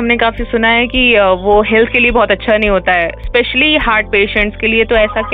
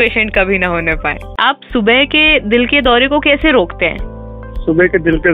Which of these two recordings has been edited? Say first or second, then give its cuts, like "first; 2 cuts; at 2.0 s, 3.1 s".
second; 1 cut; at 1.2 s